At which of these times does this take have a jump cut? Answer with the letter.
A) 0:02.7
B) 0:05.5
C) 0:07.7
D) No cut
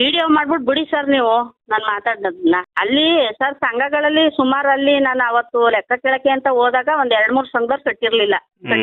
A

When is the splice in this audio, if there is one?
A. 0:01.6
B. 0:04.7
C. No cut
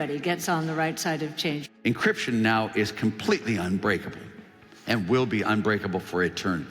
A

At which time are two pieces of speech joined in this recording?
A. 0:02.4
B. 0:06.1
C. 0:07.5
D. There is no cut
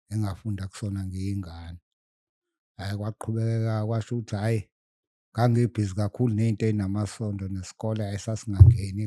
D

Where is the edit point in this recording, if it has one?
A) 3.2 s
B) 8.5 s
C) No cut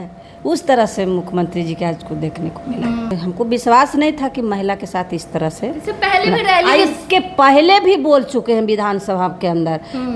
A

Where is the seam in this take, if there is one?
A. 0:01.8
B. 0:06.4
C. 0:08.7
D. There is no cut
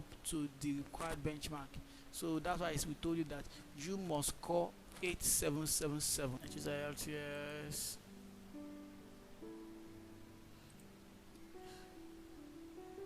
B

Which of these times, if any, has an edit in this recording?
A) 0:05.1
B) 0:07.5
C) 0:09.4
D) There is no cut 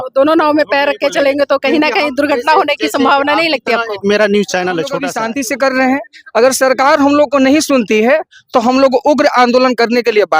A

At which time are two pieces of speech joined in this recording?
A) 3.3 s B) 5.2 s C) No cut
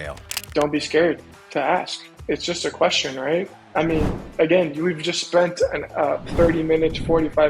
C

